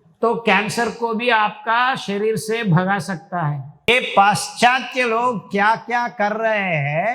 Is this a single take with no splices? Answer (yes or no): no